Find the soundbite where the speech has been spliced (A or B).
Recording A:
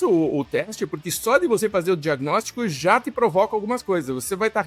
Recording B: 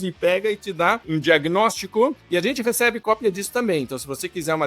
B